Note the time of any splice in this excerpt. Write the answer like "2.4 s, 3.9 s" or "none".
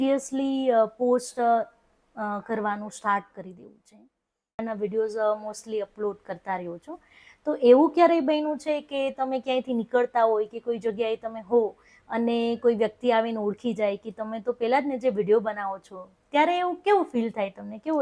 4.6 s